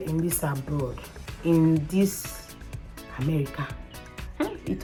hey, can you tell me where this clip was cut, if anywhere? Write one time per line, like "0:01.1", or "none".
none